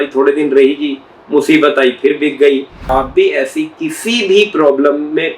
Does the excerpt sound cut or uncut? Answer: cut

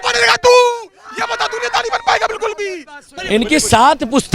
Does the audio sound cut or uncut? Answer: cut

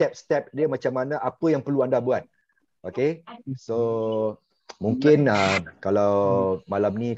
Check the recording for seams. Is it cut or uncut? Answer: uncut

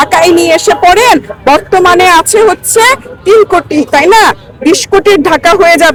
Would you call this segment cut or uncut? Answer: uncut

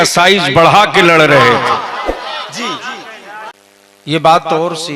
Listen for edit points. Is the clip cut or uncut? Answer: cut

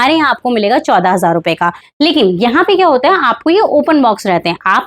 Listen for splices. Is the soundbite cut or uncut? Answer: cut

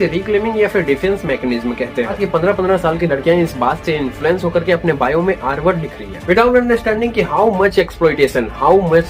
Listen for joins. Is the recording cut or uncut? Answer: cut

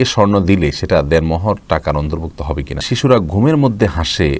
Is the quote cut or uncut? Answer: cut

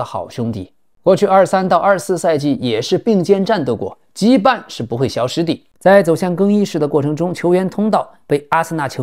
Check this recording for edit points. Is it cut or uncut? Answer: cut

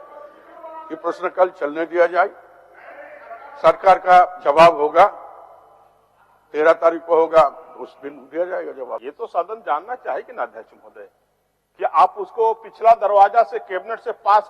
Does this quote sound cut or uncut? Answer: cut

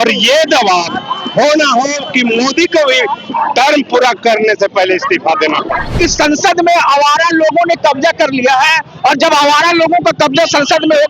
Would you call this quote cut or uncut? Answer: cut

